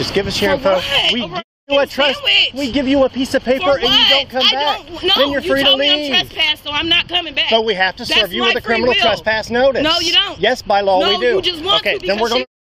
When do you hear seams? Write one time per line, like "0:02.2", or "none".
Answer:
none